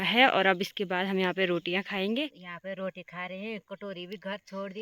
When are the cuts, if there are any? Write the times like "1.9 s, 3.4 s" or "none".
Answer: 2.9 s